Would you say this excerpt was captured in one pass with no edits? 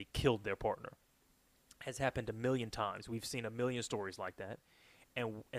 yes; 0 cuts

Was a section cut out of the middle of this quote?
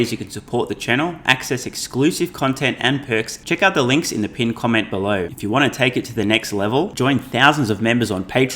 yes; 2 cuts; at 3.4 s, 5.3 s

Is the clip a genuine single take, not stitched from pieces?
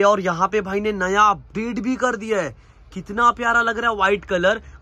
yes; 0 cuts

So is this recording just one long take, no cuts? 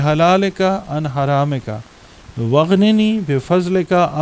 yes; 0 cuts

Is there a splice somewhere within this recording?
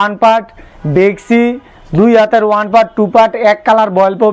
no; 0 cuts

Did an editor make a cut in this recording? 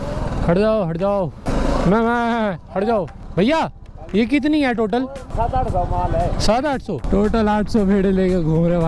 yes; 4 cuts; at 1.5 s, 3.3 s, 5.2 s, 7.0 s

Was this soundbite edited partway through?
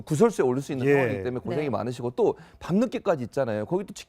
yes; 1 cut; at 2.5 s

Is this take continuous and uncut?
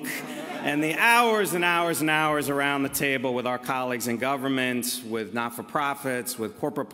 no; 1 cut; at 2.3 s

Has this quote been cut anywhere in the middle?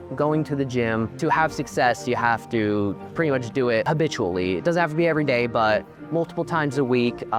yes; 2 cuts; at 1.1 s, 3.9 s

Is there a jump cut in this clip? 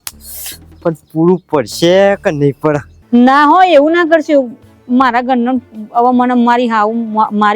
yes; 1 cut; at 2.9 s

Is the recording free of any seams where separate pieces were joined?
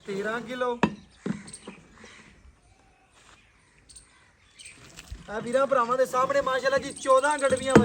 yes; 0 cuts

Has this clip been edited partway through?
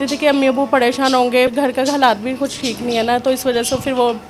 yes; 1 cut; at 1.5 s

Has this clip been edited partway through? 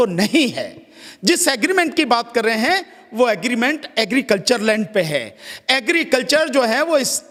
no; 0 cuts

